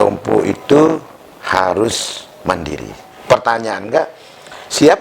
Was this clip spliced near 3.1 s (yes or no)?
yes